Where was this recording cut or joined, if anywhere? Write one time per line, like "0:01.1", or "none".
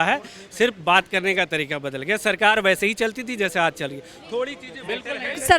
none